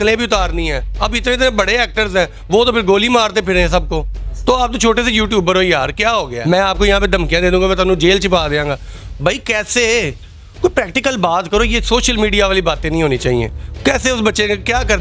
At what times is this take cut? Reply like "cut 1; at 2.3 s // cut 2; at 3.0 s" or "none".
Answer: cut 1; at 6.4 s